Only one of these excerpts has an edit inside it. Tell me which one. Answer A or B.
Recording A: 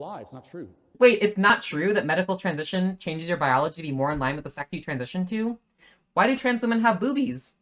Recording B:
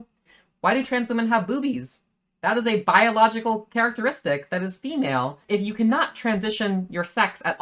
B